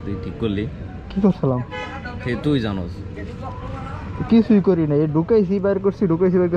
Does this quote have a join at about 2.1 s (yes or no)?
no